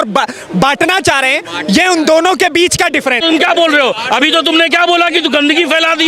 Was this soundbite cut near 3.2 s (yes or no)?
yes